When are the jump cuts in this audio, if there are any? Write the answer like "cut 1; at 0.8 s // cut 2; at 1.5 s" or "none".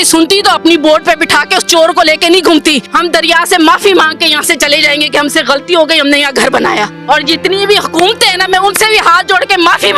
cut 1; at 2.9 s // cut 2; at 7.0 s